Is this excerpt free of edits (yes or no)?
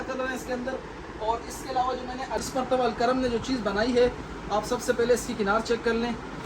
no